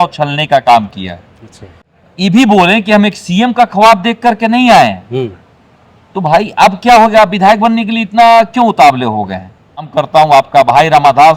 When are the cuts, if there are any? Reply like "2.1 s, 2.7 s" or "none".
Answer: 1.8 s, 9.8 s